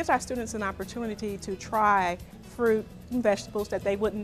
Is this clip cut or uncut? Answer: uncut